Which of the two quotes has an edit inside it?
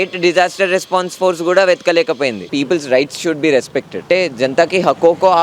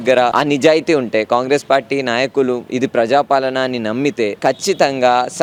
first; 1 cut; at 2.5 s

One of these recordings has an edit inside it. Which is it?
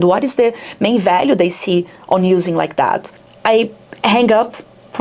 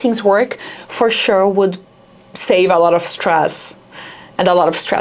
first; 1 cut; at 3.2 s

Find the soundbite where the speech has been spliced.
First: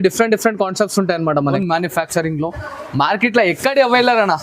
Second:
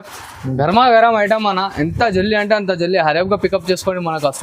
first; 1 cut; at 1.5 s

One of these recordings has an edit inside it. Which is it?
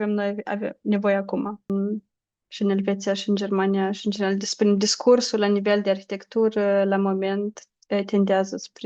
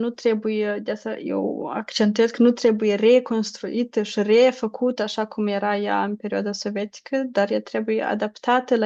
first; 1 cut; at 1.7 s

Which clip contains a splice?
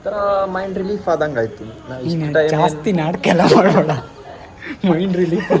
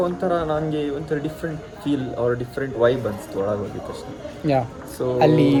first; 1 cut; at 4.7 s

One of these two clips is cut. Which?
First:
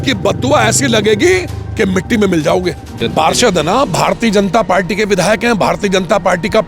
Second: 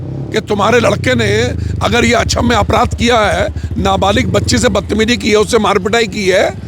first; 1 cut; at 2.9 s

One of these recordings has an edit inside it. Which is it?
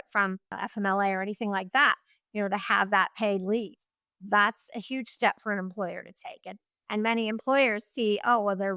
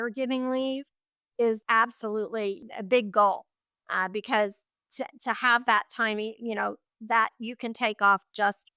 second; 2 cuts; at 1.6 s, 2.6 s

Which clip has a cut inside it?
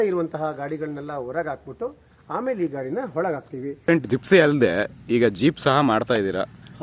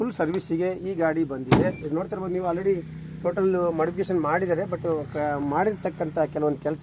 first; 1 cut; at 3.9 s

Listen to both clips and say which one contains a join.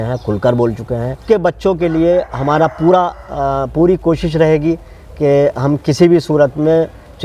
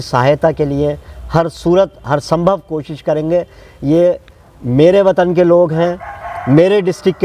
first; 1 cut; at 1.2 s

